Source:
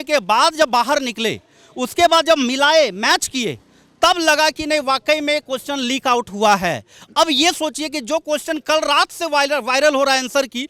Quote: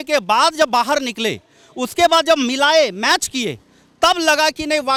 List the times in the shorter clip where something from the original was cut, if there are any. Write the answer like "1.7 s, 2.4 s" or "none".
none

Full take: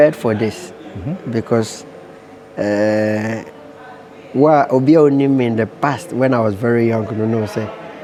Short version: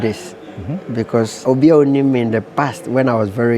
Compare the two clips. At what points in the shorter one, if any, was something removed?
1.4 s

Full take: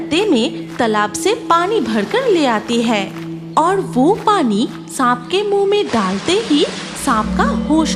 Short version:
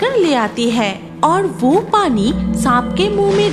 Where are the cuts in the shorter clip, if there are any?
1.0 s

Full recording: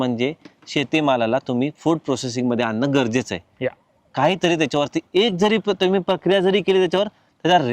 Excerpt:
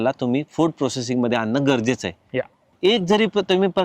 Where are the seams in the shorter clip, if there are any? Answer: 2.7 s

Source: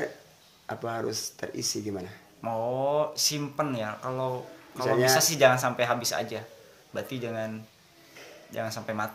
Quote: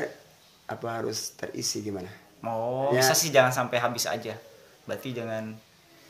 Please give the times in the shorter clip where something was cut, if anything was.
2.9 s

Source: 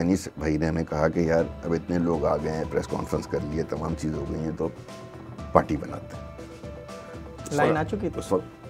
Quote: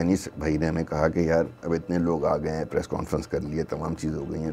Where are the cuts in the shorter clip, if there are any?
none

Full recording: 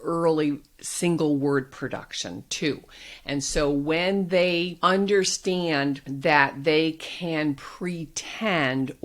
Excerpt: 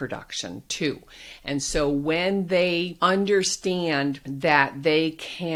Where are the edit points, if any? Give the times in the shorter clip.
none

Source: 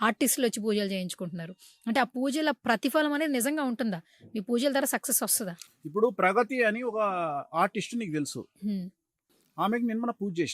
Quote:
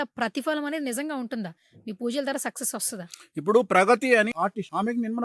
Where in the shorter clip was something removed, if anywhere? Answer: 4.3 s

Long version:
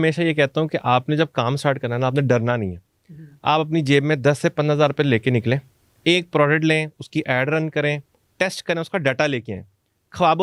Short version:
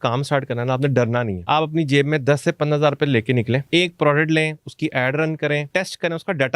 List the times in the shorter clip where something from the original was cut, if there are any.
1.4 s, 3.6 s, 5.7 s

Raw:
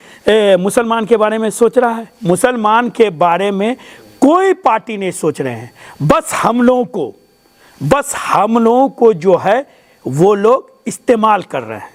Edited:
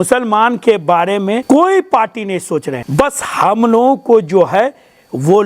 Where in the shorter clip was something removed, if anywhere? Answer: 1.4 s, 2.8 s

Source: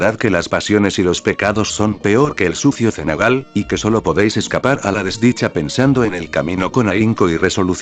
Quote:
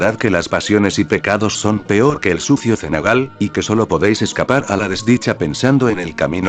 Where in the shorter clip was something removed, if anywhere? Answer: 1.0 s

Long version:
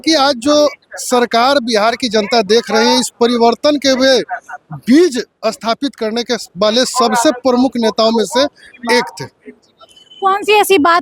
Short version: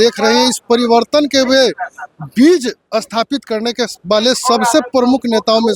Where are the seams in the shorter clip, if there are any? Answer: none

